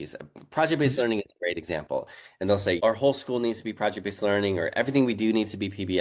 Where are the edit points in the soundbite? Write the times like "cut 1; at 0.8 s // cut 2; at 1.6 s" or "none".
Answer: cut 1; at 2.8 s

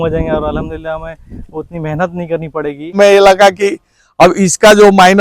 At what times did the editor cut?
cut 1; at 3.0 s

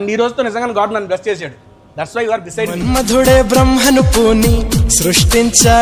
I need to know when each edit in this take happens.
none

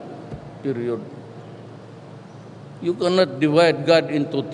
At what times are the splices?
none

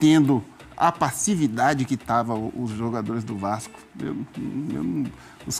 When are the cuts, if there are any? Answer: none

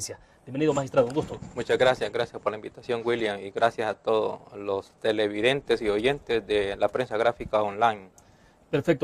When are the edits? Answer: cut 1; at 6.5 s

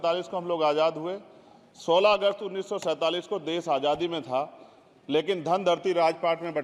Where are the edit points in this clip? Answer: none

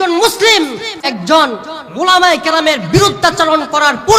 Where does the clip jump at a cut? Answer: cut 1; at 1.1 s

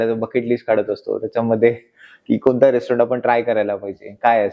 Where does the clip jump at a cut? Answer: none

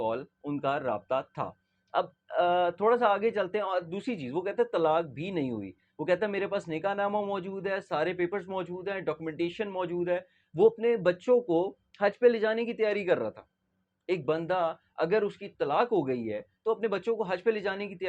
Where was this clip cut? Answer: none

